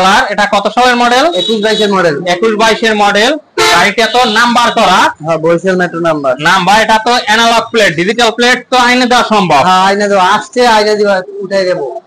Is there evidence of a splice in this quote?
no; 0 cuts

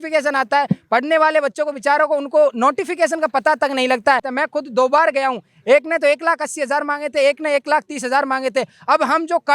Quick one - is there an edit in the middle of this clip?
yes; 1 cut; at 4.3 s

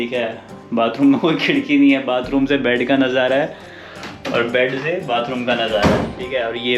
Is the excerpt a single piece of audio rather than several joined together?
yes; 0 cuts

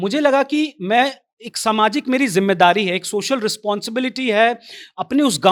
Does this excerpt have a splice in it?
no; 0 cuts

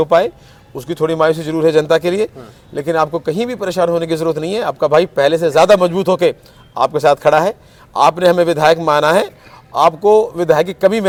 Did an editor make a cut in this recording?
no; 0 cuts

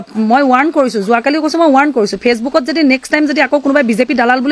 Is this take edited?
no; 0 cuts

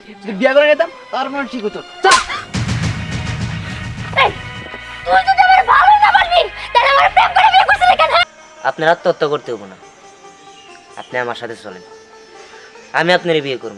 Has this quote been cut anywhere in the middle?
yes; 1 cut; at 8.2 s

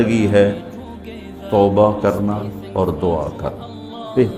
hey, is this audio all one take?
yes; 0 cuts

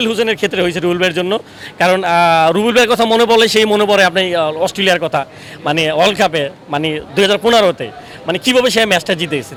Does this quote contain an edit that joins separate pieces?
no; 0 cuts

